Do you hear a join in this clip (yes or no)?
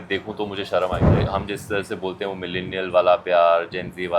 yes